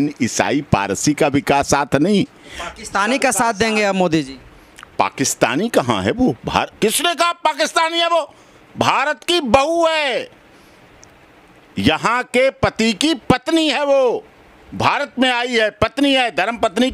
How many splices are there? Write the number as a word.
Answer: zero